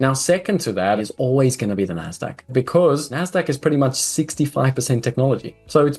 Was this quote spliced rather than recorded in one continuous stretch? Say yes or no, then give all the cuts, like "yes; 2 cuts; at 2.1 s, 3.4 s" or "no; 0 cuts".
yes; 1 cut; at 1.0 s